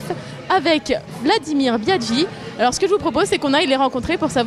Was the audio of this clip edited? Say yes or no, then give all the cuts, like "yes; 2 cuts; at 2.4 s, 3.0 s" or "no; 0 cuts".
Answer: no; 0 cuts